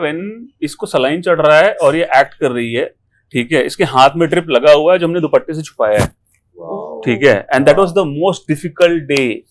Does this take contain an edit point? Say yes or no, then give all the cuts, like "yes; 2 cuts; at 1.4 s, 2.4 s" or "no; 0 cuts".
no; 0 cuts